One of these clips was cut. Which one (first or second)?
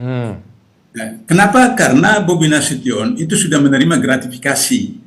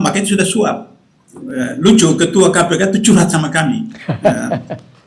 second